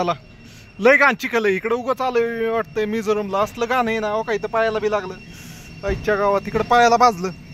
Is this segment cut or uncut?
uncut